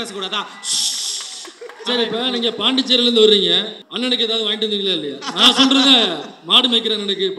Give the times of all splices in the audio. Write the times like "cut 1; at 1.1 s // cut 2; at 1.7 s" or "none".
cut 1; at 3.8 s